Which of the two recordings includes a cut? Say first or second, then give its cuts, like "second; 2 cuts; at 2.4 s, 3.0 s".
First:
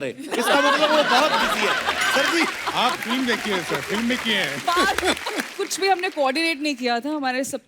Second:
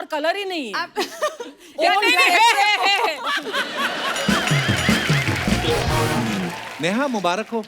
first; 1 cut; at 5.5 s